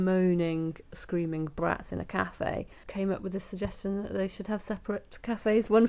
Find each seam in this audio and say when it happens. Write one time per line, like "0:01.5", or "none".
0:02.8